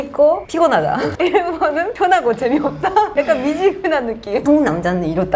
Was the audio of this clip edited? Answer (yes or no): yes